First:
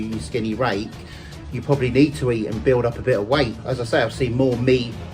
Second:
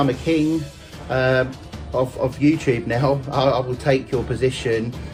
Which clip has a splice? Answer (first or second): first